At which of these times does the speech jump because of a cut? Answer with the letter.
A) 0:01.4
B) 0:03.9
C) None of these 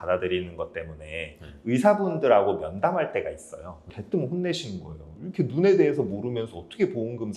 B